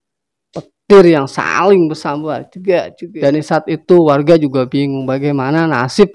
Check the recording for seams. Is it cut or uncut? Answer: cut